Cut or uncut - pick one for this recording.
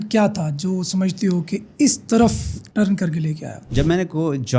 cut